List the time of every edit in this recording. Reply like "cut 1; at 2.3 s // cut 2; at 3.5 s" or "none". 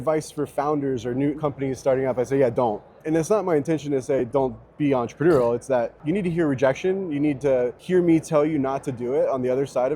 cut 1; at 1.4 s // cut 2; at 3.0 s // cut 3; at 6.0 s // cut 4; at 7.8 s